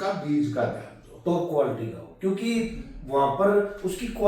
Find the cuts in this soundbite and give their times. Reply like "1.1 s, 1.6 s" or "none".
none

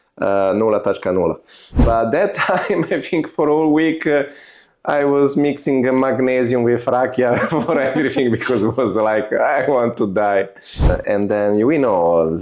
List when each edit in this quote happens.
1.9 s, 11.0 s

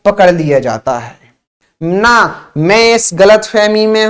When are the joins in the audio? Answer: 1.5 s

